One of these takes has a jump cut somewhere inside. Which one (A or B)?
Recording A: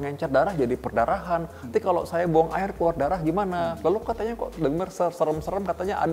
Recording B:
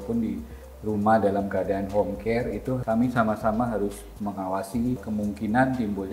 B